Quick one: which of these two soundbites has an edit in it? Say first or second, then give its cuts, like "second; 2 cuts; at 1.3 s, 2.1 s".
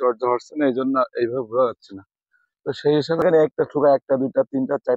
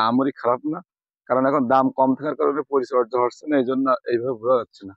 first; 1 cut; at 3.2 s